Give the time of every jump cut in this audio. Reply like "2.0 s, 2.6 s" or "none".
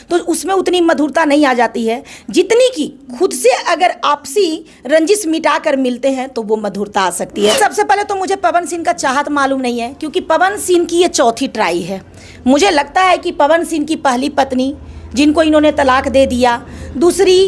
7.6 s